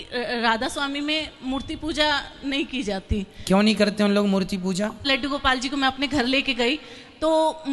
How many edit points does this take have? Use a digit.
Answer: 1